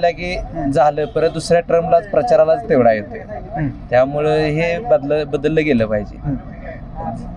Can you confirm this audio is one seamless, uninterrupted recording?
yes; 0 cuts

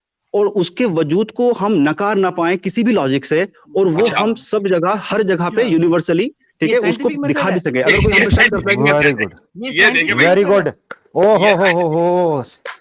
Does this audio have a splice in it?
no; 0 cuts

